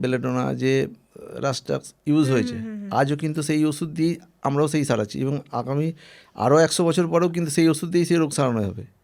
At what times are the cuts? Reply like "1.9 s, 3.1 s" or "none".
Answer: none